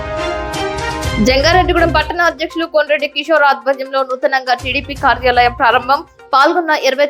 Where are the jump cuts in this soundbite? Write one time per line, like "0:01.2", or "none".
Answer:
0:01.1